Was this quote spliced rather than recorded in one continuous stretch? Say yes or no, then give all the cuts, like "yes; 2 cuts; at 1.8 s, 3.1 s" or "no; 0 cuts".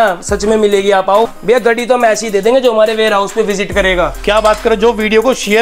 yes; 1 cut; at 1.3 s